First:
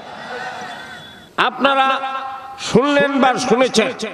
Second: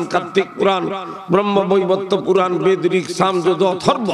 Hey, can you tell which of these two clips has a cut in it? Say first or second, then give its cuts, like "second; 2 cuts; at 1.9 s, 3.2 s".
first; 1 cut; at 1.3 s